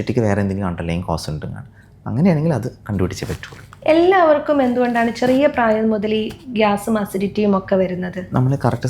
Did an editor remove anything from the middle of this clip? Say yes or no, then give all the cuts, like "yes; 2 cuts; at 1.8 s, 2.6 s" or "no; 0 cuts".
no; 0 cuts